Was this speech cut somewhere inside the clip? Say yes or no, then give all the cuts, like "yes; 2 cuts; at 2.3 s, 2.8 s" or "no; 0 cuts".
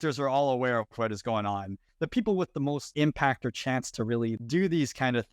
yes; 3 cuts; at 1.8 s, 2.9 s, 4.4 s